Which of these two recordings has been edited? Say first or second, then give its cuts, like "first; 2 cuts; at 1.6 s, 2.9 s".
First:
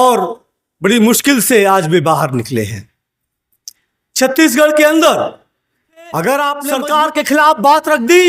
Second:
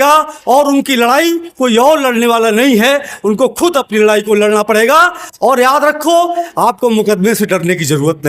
first; 1 cut; at 6.7 s